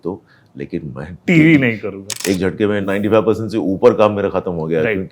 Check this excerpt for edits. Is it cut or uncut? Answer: cut